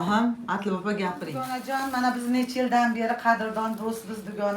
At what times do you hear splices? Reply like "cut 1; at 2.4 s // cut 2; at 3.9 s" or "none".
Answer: cut 1; at 1.7 s